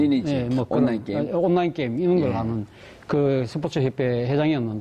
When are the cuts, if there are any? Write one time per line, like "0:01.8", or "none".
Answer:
0:01.3